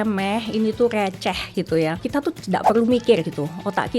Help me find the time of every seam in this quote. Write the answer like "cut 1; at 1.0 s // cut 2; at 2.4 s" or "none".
cut 1; at 2.0 s